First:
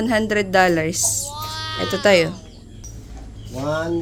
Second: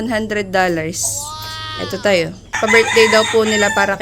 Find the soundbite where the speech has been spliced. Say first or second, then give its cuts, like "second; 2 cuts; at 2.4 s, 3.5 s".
second; 1 cut; at 2.6 s